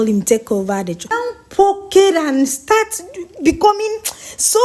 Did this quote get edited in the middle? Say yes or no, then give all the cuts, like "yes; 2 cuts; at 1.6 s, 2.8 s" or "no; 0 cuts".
yes; 1 cut; at 1.2 s